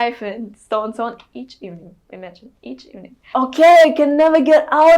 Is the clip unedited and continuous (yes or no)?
no